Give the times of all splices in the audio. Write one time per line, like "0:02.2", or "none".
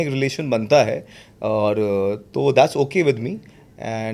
none